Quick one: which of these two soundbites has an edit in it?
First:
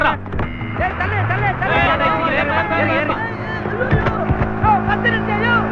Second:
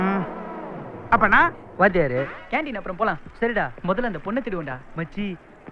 second; 1 cut; at 2.4 s

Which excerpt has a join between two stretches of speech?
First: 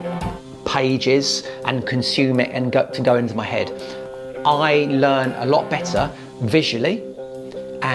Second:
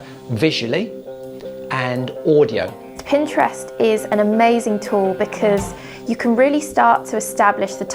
second; 1 cut; at 2.9 s

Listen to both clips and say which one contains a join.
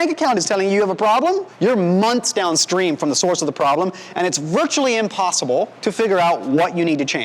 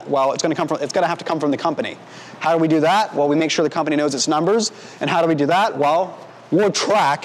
first; 2 cuts; at 1.5 s, 5.7 s

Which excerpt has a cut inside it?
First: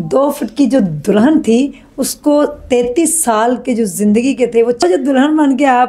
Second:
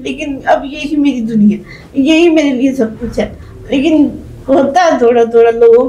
first; 1 cut; at 4.8 s

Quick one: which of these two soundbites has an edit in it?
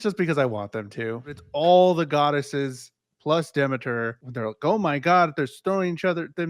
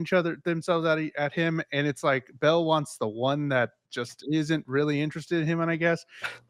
first; 2 cuts; at 1.4 s, 4.2 s

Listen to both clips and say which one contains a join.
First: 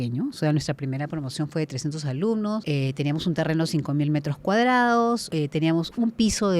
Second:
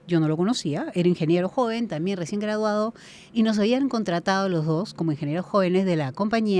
first; 2 cuts; at 2.6 s, 5.3 s

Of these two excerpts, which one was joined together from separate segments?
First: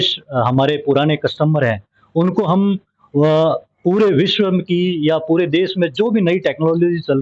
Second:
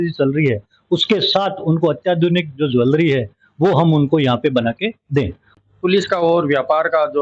second; 1 cut; at 5.6 s

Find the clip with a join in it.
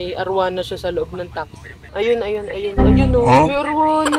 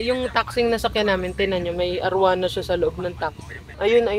first; 1 cut; at 3.3 s

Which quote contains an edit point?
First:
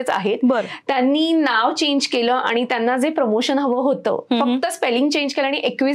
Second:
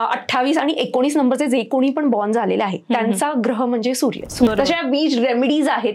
second; 1 cut; at 4.5 s

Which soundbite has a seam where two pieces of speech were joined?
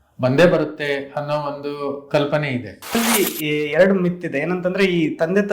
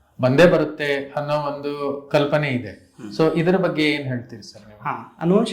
first; 1 cut; at 3.0 s

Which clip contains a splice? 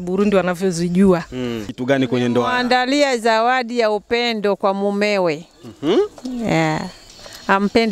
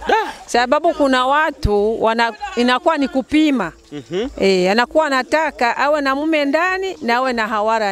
first; 1 cut; at 1.6 s

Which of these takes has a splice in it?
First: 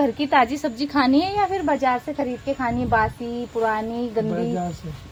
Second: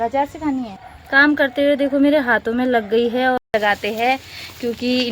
second; 2 cuts; at 0.9 s, 3.4 s

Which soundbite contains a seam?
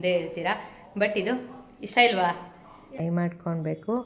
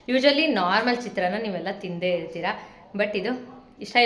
first; 1 cut; at 3.0 s

